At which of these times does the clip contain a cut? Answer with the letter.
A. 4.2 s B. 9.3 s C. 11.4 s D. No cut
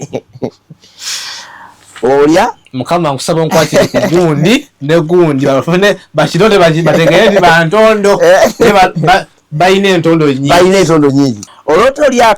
C